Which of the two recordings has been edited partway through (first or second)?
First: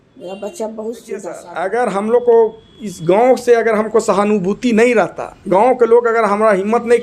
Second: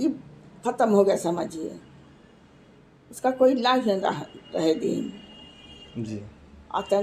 first